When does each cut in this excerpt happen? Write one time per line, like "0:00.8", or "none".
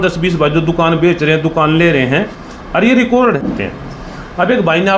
0:03.4